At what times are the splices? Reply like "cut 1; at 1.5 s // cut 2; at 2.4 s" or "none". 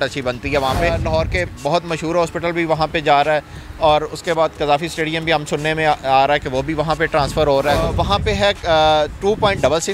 cut 1; at 1.0 s // cut 2; at 8.0 s